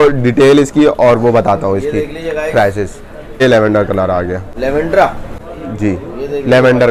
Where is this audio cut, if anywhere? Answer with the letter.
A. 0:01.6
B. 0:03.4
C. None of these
B